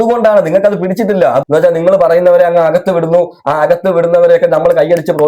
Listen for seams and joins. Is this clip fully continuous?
no; 1 cut; at 1.4 s

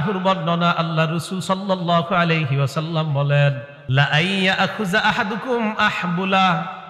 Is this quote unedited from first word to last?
no; 1 cut; at 3.7 s

